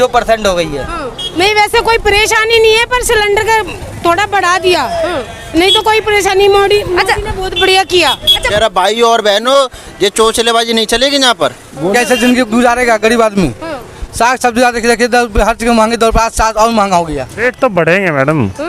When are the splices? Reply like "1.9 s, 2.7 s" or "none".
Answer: 1.3 s, 8.4 s, 11.9 s, 17.2 s